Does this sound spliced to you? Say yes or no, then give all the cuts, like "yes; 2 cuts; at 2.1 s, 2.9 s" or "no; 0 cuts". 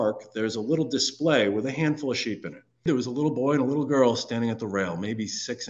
yes; 1 cut; at 2.8 s